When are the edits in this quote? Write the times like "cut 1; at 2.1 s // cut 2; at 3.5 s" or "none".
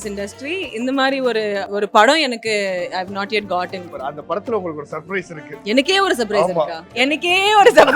cut 1; at 1.6 s // cut 2; at 3.8 s // cut 3; at 5.4 s // cut 4; at 6.8 s